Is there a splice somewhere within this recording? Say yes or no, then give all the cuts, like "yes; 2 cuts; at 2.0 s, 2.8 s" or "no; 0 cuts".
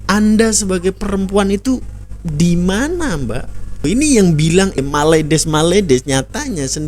yes; 2 cuts; at 3.8 s, 4.8 s